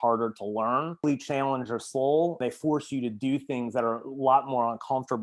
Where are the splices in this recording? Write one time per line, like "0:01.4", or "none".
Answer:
0:01.0
0:02.4